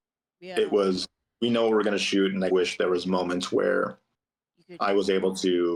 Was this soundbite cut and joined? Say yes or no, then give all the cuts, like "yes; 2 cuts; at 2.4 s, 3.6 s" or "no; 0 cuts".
no; 0 cuts